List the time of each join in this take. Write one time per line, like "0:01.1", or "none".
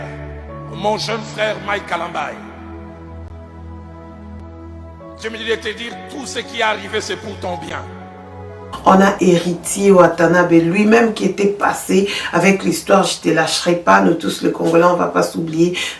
0:08.7